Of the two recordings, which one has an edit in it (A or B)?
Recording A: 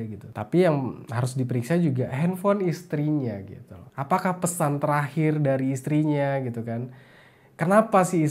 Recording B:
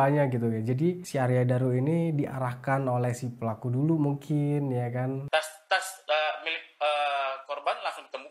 B